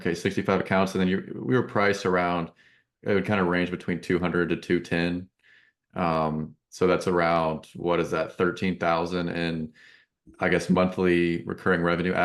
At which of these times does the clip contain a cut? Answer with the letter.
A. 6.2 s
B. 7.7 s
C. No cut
C